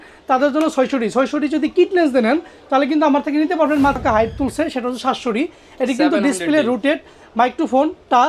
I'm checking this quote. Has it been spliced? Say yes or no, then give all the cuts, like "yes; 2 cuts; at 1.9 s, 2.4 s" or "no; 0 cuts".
yes; 1 cut; at 4.0 s